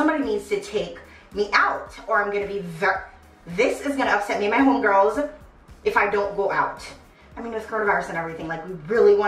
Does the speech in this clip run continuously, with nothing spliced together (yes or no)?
yes